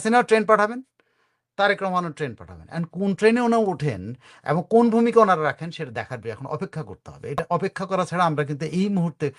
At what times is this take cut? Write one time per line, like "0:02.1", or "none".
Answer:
none